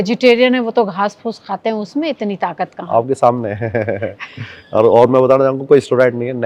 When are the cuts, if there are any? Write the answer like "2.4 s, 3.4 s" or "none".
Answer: none